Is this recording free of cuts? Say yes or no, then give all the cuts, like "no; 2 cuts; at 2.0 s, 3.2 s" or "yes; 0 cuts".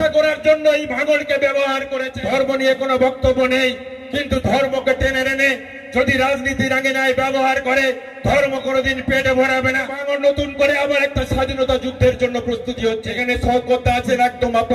no; 3 cuts; at 2.0 s, 10.0 s, 13.1 s